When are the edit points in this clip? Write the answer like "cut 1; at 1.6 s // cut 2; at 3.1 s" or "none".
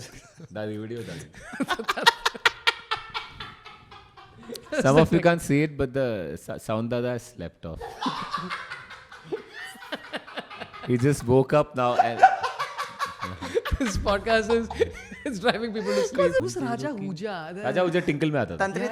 cut 1; at 16.4 s